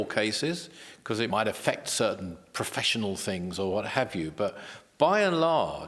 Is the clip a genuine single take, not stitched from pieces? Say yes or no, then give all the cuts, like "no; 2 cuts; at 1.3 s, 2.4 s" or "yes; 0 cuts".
no; 1 cut; at 1.3 s